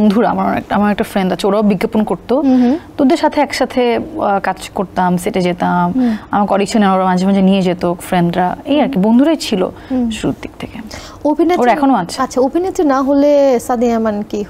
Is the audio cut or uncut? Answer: uncut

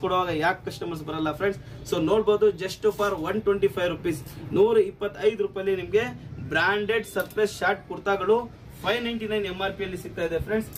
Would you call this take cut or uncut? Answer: uncut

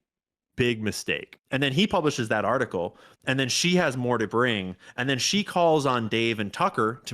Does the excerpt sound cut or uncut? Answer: cut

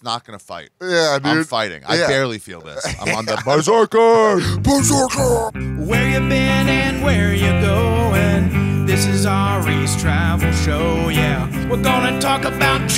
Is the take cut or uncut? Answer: cut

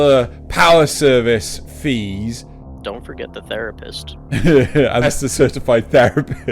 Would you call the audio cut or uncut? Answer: cut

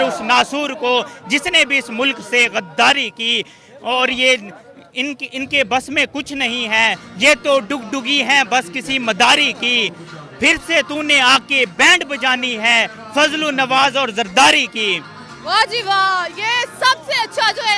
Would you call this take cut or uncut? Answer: uncut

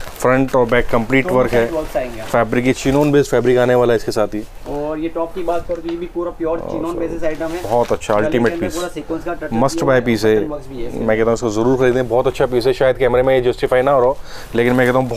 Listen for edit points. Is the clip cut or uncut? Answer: uncut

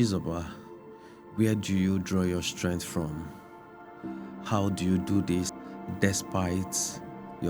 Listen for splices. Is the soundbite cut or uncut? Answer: cut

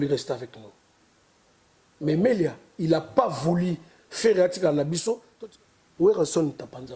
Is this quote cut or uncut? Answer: cut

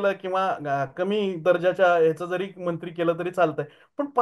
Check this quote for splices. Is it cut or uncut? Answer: uncut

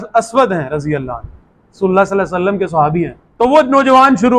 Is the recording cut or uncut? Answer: cut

